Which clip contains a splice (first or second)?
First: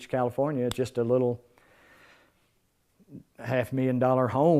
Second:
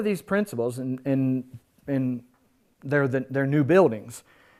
first